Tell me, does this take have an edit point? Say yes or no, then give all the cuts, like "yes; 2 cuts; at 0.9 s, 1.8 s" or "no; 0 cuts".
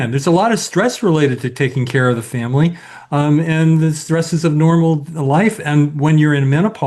no; 0 cuts